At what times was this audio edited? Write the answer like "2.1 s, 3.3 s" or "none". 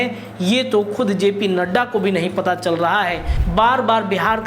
3.3 s